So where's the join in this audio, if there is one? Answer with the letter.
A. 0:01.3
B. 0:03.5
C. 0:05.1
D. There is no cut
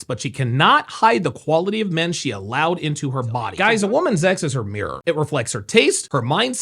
B